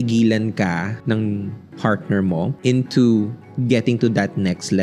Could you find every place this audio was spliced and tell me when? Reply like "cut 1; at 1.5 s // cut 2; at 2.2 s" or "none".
cut 1; at 0.9 s // cut 2; at 2.6 s